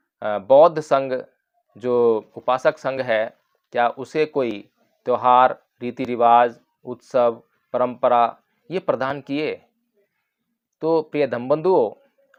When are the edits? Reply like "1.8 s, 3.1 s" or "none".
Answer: none